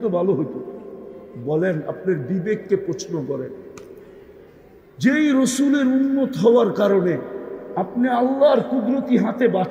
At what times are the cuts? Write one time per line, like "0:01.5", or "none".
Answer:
none